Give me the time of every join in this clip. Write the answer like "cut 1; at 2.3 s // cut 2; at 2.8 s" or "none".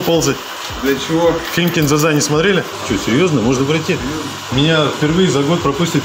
cut 1; at 2.7 s // cut 2; at 4.5 s